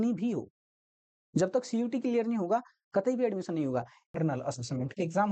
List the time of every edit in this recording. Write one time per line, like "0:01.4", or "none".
0:04.2